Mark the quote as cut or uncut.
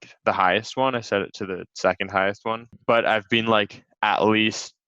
cut